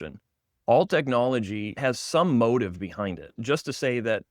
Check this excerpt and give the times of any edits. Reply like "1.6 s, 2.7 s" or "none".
1.7 s, 3.3 s